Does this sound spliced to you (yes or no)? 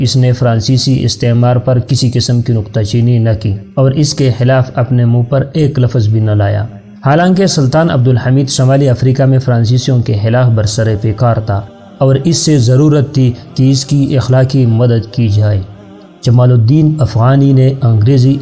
no